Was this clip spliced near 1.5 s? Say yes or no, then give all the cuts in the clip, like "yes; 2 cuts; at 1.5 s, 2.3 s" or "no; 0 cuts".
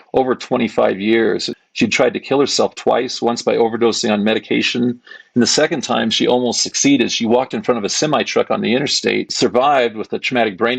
yes; 2 cuts; at 1.5 s, 9.3 s